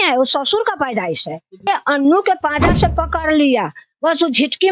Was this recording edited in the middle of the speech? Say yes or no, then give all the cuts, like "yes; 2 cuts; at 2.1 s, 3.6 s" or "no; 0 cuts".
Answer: yes; 1 cut; at 1.7 s